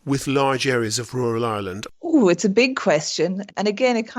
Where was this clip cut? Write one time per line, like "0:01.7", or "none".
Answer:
0:01.8